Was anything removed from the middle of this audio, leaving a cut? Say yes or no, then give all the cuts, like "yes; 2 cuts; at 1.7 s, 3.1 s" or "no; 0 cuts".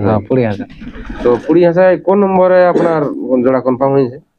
no; 0 cuts